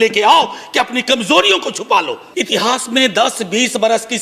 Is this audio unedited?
no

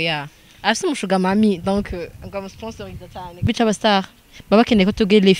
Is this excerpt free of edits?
no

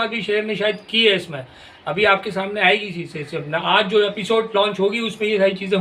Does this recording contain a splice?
no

